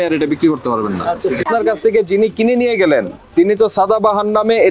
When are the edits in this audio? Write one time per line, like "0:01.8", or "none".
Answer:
0:01.4